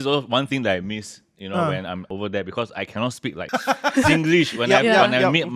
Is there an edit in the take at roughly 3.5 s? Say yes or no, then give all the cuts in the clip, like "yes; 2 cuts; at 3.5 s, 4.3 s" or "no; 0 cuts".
yes; 2 cuts; at 2.1 s, 3.5 s